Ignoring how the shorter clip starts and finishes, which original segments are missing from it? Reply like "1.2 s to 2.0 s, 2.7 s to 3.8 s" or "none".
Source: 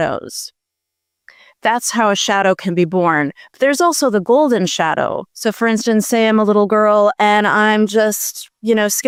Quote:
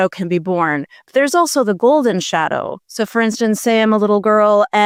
none